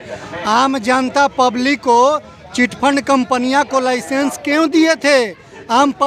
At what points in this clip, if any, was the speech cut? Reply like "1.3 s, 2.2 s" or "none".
none

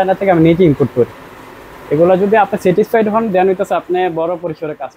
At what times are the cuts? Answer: none

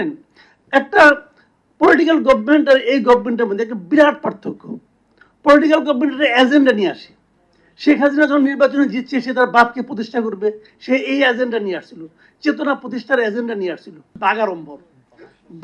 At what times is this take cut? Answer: 14.1 s

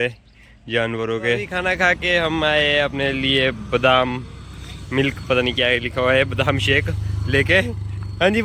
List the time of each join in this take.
1.5 s

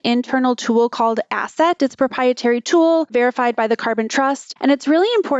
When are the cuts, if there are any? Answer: 3.1 s, 4.5 s

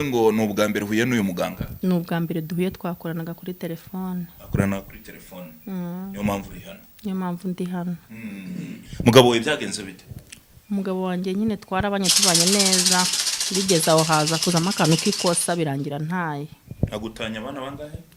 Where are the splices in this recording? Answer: none

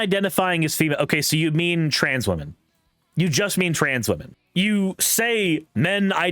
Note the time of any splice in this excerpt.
4.4 s

